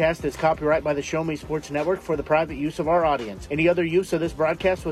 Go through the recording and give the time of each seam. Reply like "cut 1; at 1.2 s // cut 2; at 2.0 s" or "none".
none

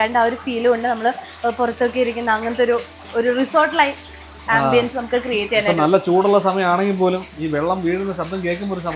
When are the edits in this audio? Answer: none

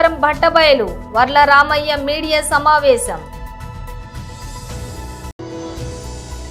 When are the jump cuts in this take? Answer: none

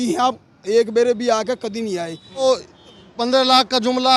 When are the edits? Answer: cut 1; at 2.4 s

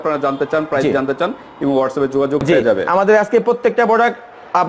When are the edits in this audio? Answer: cut 1; at 2.4 s

